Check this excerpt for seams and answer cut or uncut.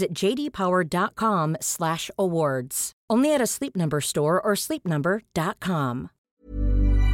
cut